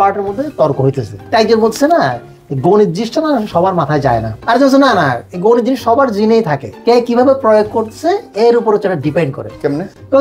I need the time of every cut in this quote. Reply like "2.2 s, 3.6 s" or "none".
1.1 s, 4.3 s, 6.6 s